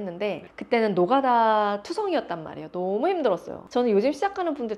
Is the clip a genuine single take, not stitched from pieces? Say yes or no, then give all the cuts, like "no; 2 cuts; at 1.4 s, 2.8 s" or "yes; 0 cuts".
no; 1 cut; at 3.6 s